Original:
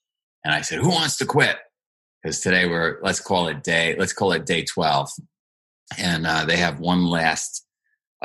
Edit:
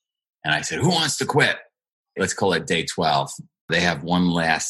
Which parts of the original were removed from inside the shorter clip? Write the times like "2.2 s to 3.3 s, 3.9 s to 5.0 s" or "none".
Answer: 2.1 s to 3.9 s, 5.5 s to 6.4 s